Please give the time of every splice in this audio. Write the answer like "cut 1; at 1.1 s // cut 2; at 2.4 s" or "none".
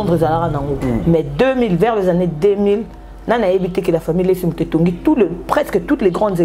none